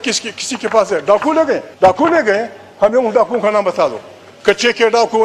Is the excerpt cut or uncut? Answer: cut